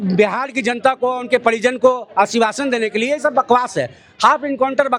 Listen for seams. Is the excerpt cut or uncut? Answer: uncut